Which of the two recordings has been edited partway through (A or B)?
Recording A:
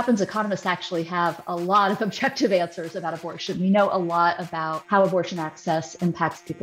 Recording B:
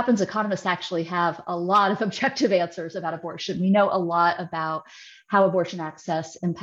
A